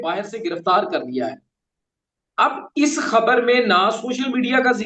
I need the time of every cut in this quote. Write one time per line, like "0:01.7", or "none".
none